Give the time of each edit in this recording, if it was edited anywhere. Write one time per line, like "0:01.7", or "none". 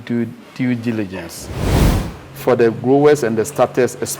0:01.7